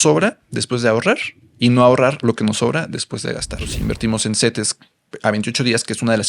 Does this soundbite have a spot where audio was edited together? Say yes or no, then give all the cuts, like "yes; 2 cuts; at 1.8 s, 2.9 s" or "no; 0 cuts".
yes; 1 cut; at 3.7 s